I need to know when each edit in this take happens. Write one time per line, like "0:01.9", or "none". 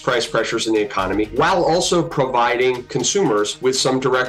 0:01.3
0:03.2